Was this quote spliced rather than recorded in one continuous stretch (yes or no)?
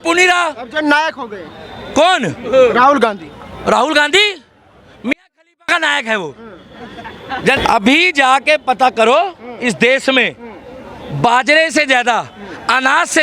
yes